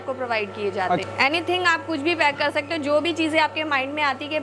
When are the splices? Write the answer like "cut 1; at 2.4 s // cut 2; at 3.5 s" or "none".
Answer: cut 1; at 1.0 s